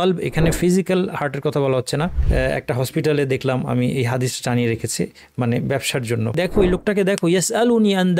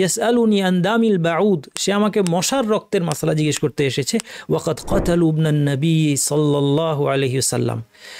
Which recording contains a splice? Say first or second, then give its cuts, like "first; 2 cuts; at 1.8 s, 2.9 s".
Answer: first; 2 cuts; at 2.2 s, 6.4 s